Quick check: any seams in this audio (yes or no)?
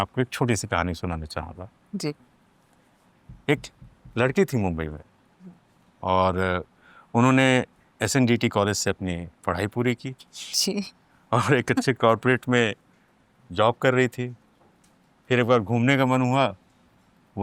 no